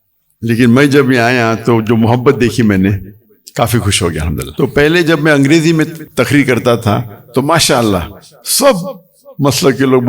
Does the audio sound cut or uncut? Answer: cut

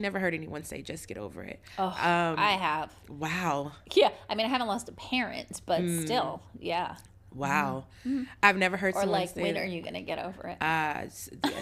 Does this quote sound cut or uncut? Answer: uncut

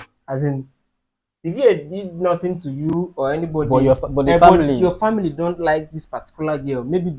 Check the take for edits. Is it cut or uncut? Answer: uncut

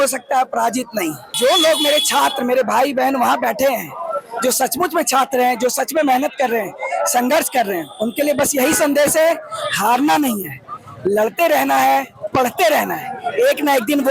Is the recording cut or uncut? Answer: cut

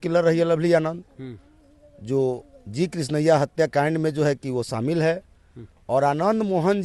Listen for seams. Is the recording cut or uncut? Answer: uncut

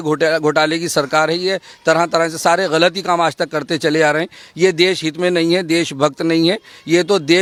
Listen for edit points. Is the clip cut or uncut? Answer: uncut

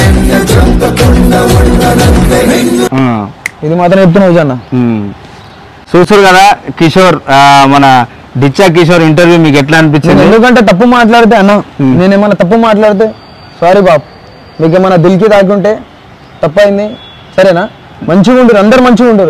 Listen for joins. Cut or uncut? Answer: uncut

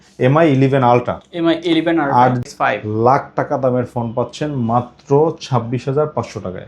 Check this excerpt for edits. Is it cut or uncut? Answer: cut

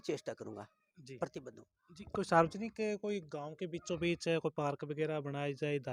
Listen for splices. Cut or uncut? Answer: uncut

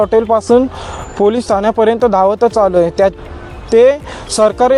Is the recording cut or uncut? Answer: uncut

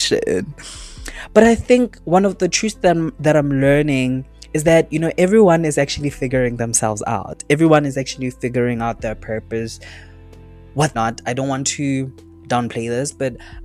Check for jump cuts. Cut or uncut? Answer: cut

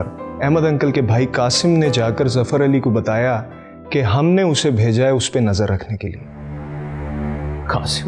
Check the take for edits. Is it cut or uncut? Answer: uncut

